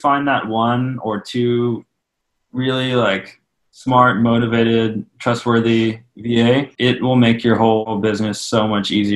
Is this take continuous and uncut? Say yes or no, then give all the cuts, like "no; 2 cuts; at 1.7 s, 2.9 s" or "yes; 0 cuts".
no; 2 cuts; at 6.7 s, 7.9 s